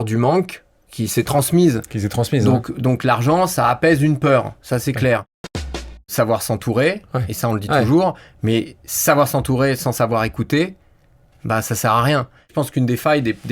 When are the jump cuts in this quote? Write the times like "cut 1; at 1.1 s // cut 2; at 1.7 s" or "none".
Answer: cut 1; at 5.8 s // cut 2; at 12.5 s